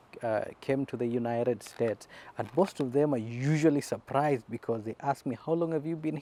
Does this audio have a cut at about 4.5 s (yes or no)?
no